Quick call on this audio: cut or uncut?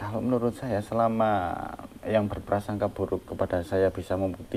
uncut